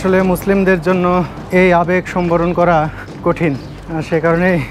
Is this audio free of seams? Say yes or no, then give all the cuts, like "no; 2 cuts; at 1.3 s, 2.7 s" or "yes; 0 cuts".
yes; 0 cuts